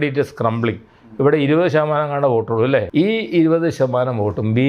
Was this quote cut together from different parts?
yes; 1 cut; at 2.9 s

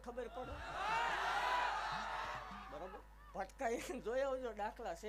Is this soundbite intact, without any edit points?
yes; 0 cuts

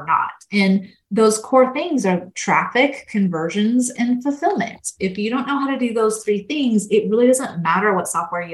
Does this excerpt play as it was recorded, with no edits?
no; 1 cut; at 1.0 s

